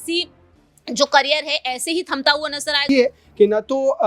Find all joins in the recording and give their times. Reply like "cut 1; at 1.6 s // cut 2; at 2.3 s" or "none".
cut 1; at 2.8 s